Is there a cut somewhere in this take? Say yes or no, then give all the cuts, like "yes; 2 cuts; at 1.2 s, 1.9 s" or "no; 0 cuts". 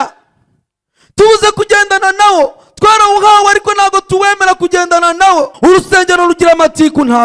yes; 1 cut; at 5.5 s